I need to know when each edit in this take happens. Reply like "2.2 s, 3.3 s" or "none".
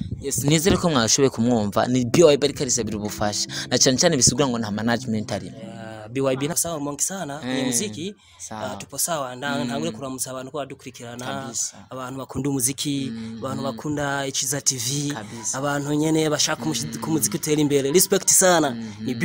6.5 s